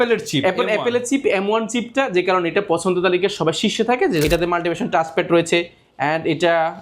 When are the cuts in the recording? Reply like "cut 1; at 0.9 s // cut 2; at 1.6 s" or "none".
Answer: cut 1; at 4.2 s